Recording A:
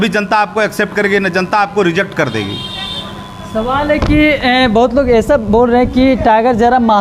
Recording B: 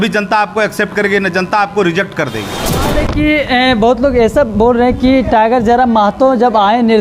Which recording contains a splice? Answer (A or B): B